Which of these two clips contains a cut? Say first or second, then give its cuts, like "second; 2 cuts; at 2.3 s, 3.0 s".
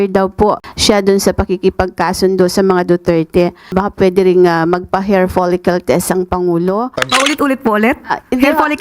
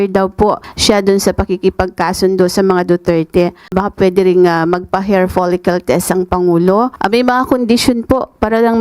first; 1 cut; at 6.9 s